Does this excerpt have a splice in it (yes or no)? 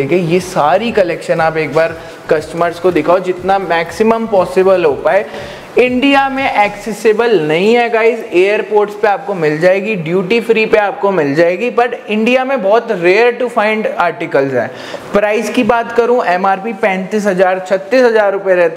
no